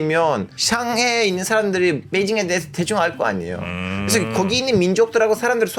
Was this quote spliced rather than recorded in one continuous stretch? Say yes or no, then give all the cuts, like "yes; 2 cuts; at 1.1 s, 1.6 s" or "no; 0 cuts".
no; 0 cuts